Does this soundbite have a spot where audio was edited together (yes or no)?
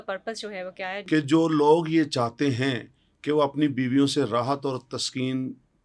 yes